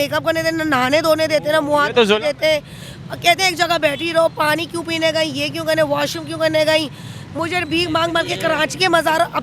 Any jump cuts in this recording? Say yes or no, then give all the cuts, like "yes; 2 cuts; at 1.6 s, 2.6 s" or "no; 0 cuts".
no; 0 cuts